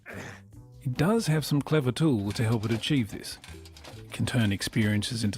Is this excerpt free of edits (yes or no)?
no